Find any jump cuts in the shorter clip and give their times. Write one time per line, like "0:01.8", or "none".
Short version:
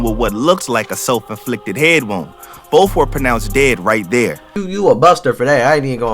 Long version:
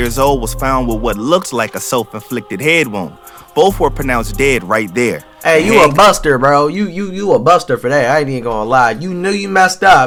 0:04.5

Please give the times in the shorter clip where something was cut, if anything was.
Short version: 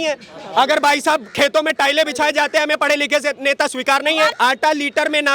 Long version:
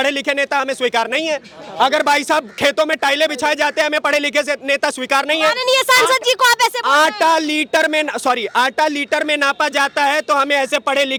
0:04.3

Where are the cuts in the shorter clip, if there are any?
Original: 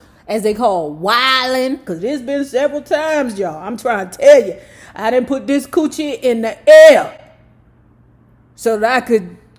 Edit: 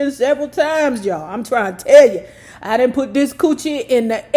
none

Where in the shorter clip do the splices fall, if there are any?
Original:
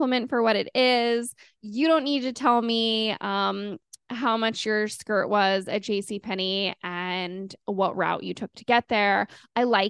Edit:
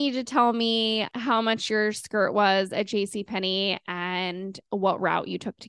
0:01.1

